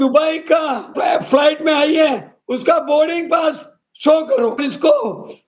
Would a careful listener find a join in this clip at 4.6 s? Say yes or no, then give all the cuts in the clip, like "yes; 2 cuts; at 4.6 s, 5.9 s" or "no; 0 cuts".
yes; 2 cuts; at 0.9 s, 4.6 s